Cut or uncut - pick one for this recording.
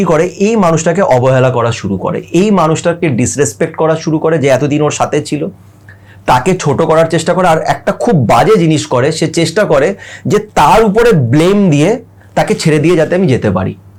uncut